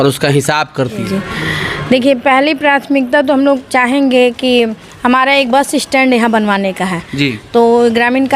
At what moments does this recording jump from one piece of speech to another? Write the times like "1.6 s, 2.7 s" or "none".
1.0 s